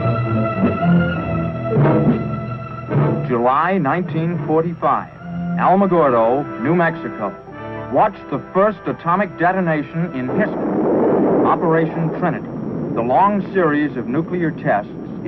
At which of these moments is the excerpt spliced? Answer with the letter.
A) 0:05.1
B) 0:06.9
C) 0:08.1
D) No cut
D